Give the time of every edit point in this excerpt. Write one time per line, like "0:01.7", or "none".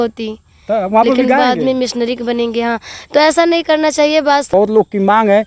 0:04.5